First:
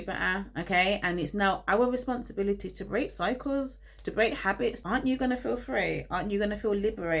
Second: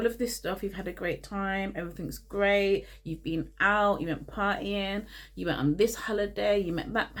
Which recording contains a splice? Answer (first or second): first